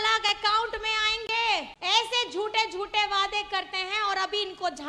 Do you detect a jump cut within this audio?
yes; 1 cut; at 1.7 s

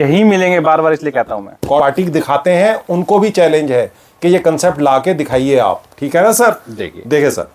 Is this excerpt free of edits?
no; 1 cut; at 1.8 s

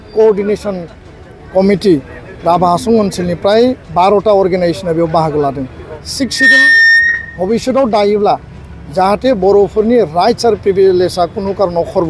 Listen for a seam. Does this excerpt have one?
yes; 1 cut; at 6.0 s

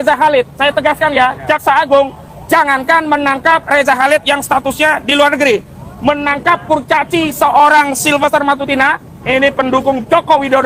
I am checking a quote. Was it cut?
no; 0 cuts

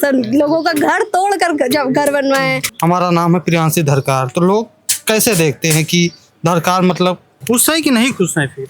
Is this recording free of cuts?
no; 2 cuts; at 2.7 s, 7.3 s

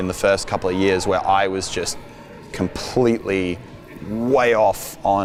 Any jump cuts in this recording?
no; 0 cuts

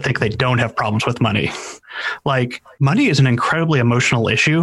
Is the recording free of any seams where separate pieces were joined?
no; 1 cut; at 2.6 s

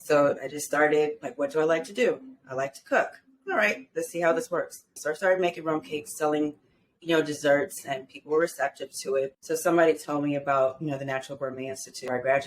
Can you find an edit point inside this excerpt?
yes; 2 cuts; at 4.9 s, 9.4 s

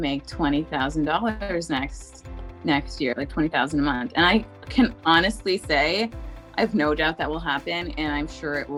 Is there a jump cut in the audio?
no; 0 cuts

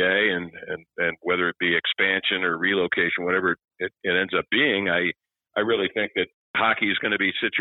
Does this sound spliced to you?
yes; 1 cut; at 6.4 s

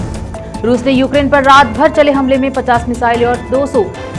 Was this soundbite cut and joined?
no; 0 cuts

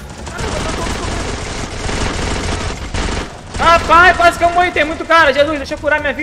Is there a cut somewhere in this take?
no; 0 cuts

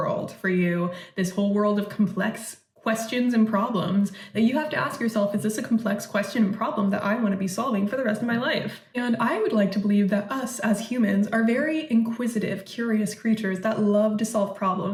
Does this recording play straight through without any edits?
yes; 0 cuts

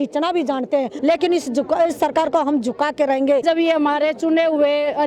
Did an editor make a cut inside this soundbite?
yes; 2 cuts; at 0.9 s, 3.4 s

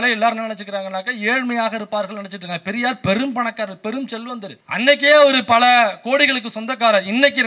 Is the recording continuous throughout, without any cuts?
yes; 0 cuts

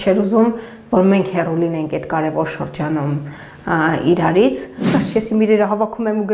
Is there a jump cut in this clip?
yes; 1 cut; at 4.9 s

